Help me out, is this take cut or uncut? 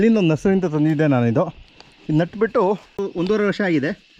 cut